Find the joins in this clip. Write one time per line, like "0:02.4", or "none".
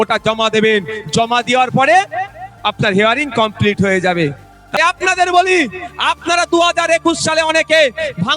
0:04.8